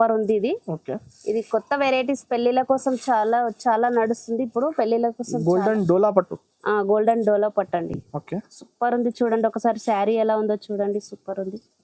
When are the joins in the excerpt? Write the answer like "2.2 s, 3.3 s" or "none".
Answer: none